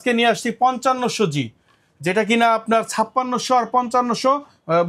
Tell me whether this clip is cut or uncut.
uncut